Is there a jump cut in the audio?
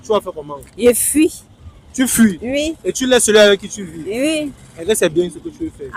no; 0 cuts

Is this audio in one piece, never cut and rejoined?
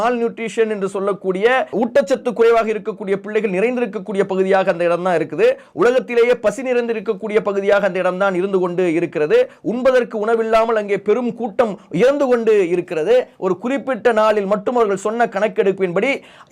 no; 1 cut; at 1.7 s

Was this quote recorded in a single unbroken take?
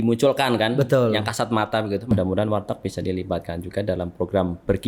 no; 1 cut; at 2.1 s

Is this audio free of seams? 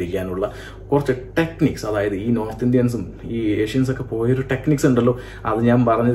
yes; 0 cuts

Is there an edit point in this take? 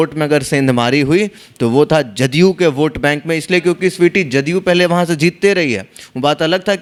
no; 0 cuts

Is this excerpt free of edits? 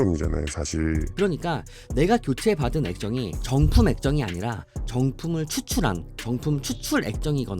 no; 1 cut; at 1.1 s

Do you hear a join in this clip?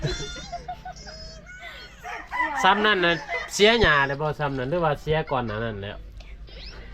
no; 0 cuts

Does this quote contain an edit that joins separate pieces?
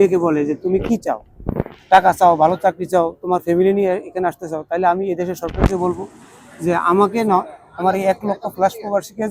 no; 0 cuts

